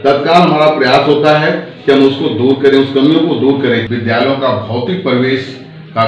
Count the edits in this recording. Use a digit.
1